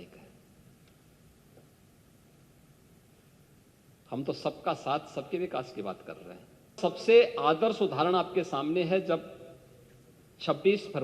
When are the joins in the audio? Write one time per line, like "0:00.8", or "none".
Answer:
0:06.8

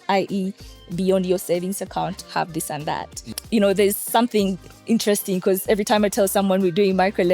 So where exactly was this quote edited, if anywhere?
0:03.3

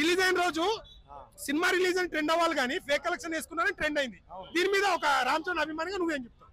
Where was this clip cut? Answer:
none

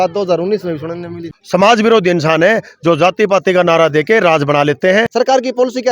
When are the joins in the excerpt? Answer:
0:01.3
0:05.1

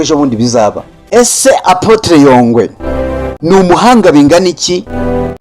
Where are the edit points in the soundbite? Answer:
0:01.0

